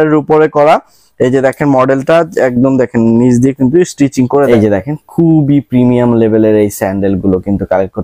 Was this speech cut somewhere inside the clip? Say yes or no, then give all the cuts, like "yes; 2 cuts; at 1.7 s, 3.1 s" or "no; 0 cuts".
yes; 1 cut; at 4.5 s